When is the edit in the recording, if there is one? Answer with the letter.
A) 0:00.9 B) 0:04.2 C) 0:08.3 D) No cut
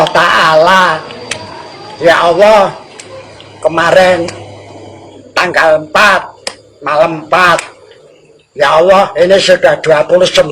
D